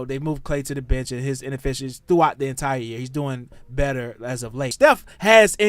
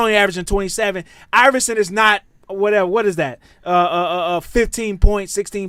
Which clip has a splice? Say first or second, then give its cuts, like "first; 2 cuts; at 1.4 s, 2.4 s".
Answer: first; 1 cut; at 4.7 s